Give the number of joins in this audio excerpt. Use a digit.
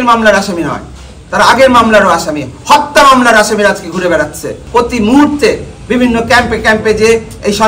1